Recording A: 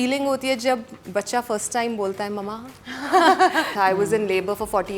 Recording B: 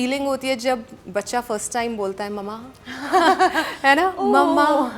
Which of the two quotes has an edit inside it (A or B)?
A